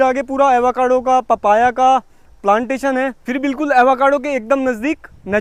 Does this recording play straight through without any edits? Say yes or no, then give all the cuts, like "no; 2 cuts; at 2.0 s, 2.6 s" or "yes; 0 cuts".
yes; 0 cuts